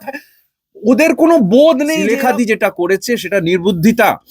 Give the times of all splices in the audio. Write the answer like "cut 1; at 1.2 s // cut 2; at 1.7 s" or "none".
cut 1; at 2.1 s